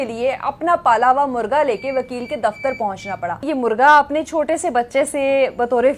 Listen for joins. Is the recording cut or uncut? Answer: cut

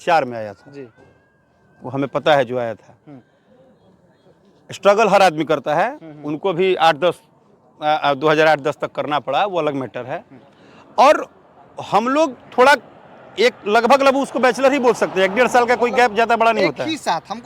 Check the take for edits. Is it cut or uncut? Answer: uncut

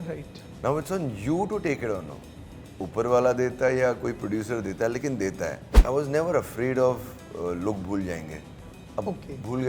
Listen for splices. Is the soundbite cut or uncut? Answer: cut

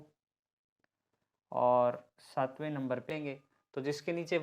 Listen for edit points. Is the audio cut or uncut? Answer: cut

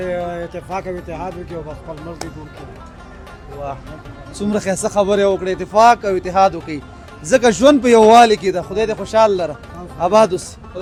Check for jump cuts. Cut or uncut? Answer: uncut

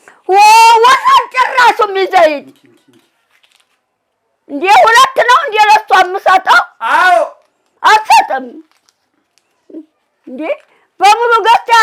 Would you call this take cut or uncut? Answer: uncut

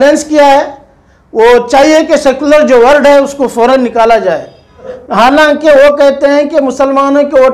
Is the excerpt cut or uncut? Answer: cut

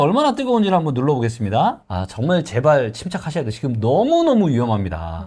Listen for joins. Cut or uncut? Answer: cut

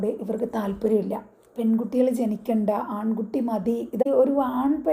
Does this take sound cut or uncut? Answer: cut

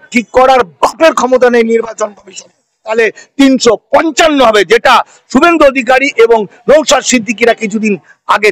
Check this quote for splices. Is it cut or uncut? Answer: cut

